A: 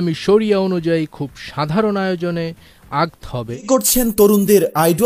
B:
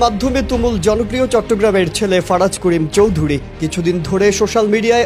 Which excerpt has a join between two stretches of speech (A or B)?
A